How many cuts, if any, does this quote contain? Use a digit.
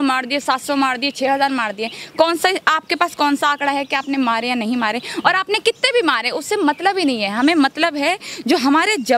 0